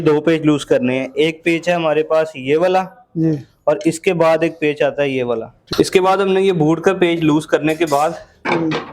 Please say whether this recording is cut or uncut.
cut